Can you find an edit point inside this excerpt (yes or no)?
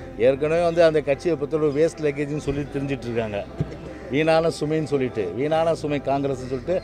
no